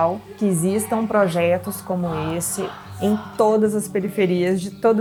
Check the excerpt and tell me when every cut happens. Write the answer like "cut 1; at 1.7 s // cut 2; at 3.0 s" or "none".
none